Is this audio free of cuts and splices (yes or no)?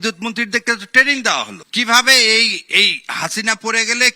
no